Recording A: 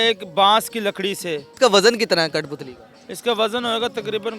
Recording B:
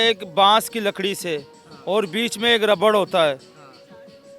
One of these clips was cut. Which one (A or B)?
A